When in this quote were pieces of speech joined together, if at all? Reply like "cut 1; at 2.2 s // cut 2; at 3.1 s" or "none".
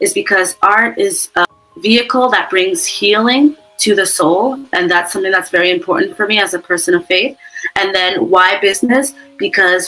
cut 1; at 1.4 s